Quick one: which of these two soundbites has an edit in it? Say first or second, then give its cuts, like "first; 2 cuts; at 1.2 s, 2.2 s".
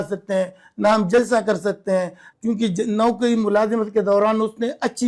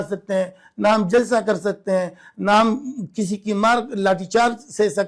first; 1 cut; at 2.3 s